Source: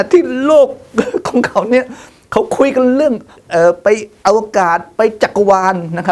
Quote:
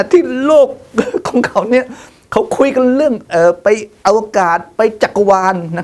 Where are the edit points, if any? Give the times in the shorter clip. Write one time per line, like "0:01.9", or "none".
0:03.2